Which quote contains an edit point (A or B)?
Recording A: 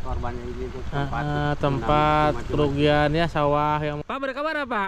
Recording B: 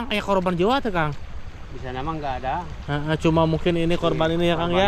A